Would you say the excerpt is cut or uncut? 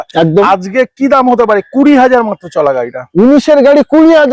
uncut